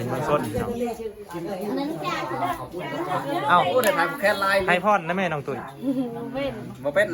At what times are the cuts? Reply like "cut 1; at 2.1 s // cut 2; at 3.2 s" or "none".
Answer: none